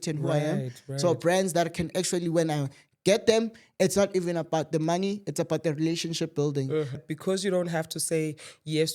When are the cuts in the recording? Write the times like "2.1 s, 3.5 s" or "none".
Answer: 7.0 s